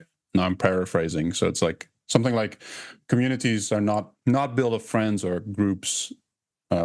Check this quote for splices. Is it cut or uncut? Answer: cut